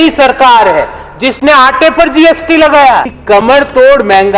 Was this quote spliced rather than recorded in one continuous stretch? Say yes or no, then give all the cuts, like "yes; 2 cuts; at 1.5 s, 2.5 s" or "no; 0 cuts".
yes; 1 cut; at 3.1 s